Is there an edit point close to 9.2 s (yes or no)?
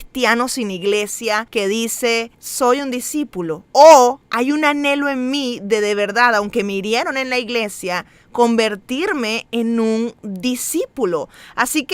no